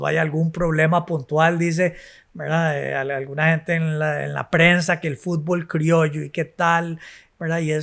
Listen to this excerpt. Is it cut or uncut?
uncut